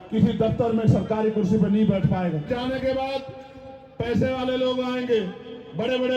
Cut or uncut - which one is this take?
cut